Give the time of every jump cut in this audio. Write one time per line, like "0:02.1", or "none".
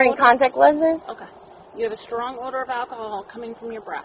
none